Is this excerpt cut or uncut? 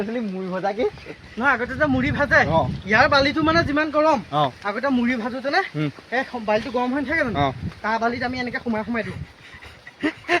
uncut